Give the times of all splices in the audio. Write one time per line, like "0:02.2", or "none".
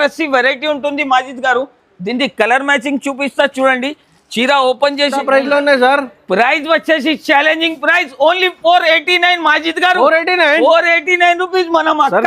0:05.2

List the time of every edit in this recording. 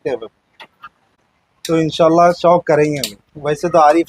0:01.1

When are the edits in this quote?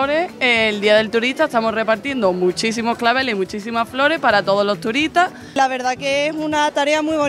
0:05.5

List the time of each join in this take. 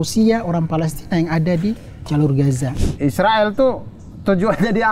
0:02.7

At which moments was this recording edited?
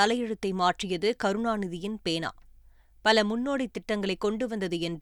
none

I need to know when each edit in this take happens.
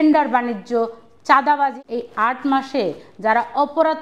0:01.8

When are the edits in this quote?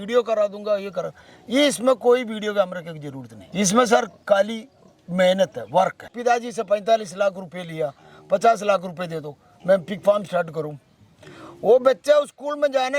0:06.1

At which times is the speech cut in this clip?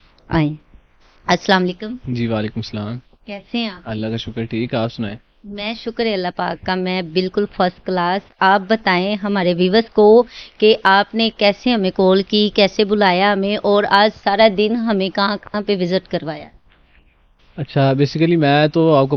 none

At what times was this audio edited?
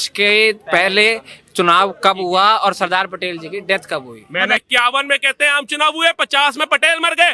0:04.6

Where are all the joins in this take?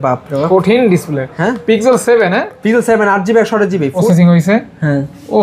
0:04.0

